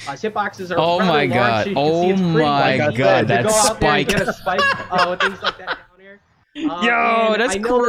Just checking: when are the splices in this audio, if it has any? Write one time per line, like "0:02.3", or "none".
none